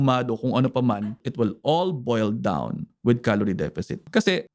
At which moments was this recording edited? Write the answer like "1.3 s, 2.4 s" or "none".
1.0 s

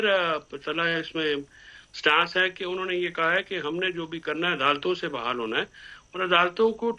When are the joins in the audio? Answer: none

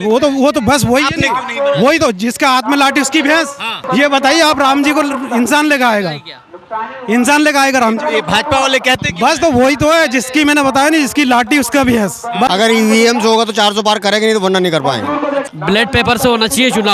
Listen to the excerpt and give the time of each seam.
3.8 s, 12.5 s, 15.5 s

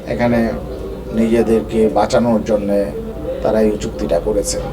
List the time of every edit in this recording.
3.1 s

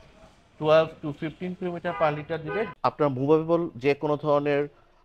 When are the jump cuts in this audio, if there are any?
2.7 s

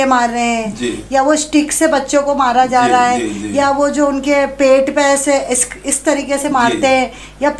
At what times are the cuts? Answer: none

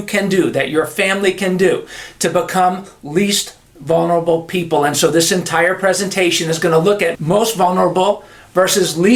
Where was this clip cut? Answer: none

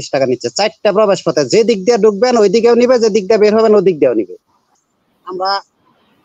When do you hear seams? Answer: 4.8 s

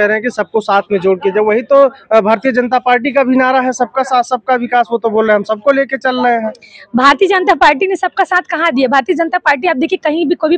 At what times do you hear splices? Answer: none

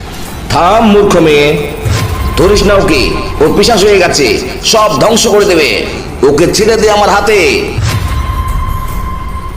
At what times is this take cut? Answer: 6.0 s

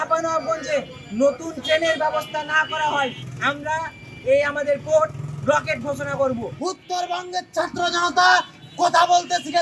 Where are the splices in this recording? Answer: 3.3 s, 6.5 s

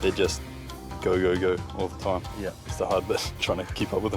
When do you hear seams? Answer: 2.6 s

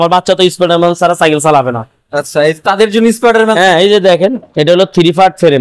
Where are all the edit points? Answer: 4.4 s

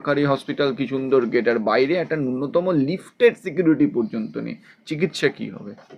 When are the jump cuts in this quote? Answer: none

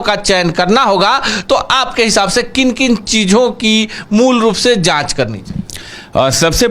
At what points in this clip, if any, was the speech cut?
none

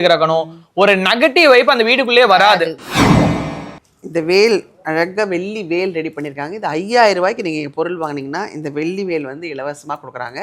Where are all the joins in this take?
2.8 s, 3.7 s

